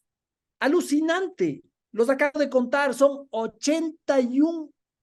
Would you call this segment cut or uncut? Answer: uncut